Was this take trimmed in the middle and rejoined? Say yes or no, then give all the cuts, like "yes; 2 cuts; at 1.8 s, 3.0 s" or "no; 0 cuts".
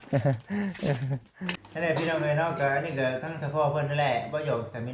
yes; 1 cut; at 1.6 s